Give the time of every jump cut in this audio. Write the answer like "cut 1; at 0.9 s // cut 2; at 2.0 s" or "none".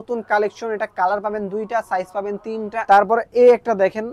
cut 1; at 2.8 s